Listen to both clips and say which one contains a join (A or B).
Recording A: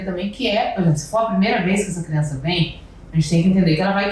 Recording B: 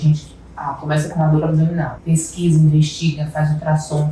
B